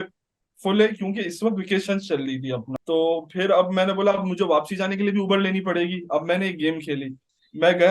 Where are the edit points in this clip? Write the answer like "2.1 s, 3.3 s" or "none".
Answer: 2.8 s